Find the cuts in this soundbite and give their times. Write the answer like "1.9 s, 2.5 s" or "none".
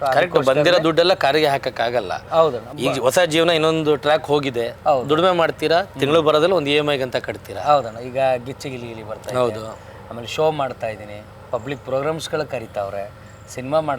none